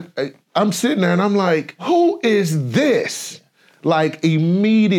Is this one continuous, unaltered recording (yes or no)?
no